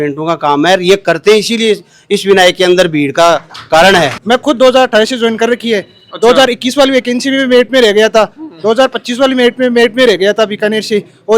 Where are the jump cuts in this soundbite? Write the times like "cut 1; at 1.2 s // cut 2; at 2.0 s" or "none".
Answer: cut 1; at 4.2 s